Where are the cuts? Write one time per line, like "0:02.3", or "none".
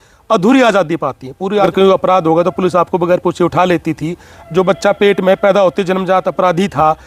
0:01.7